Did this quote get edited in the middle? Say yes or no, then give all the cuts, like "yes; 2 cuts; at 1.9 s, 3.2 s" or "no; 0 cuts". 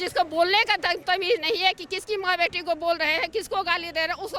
no; 0 cuts